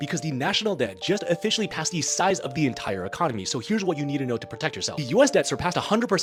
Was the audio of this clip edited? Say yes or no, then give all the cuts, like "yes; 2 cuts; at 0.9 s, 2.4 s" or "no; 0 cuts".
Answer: no; 0 cuts